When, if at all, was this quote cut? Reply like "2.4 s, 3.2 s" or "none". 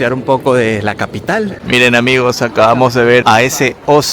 1.6 s